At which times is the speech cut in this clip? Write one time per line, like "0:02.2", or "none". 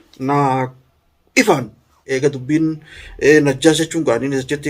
0:02.0

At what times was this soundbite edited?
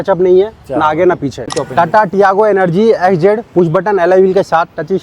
0:01.5

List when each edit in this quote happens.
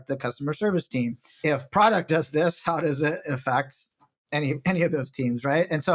0:01.4

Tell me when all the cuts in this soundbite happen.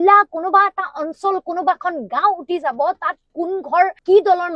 none

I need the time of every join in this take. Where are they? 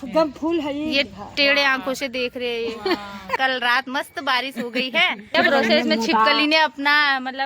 0:03.4
0:05.3

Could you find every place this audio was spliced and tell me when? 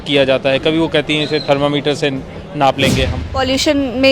0:03.2

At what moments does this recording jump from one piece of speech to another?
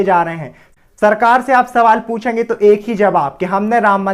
none

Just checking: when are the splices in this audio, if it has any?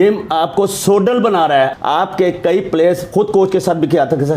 0:01.8

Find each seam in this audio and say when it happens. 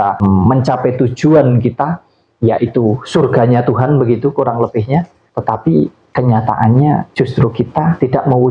0:05.2

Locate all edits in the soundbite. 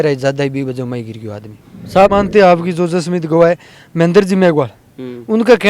0:02.1

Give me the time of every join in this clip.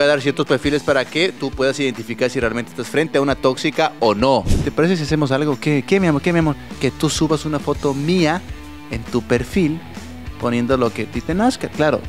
0:04.6
0:06.7

